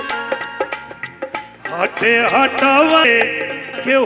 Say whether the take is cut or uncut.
cut